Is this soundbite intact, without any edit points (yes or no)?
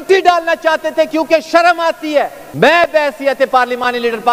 no